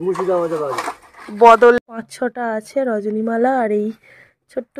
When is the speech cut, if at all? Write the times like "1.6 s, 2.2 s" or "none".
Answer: 2.0 s